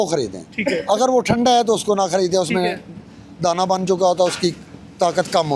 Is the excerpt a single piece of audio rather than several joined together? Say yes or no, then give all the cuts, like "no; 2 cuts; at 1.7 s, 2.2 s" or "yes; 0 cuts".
yes; 0 cuts